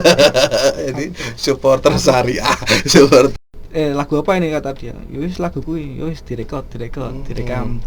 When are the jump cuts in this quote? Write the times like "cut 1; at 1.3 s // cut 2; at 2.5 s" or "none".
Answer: cut 1; at 3.3 s